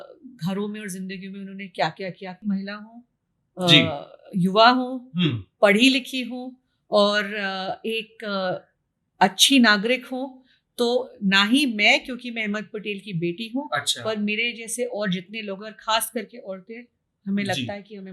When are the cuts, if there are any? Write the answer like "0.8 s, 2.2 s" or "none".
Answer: 2.4 s